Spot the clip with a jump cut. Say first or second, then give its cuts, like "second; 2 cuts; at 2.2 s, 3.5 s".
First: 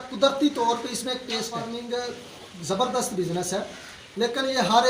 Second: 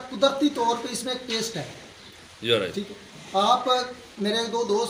first; 1 cut; at 1.7 s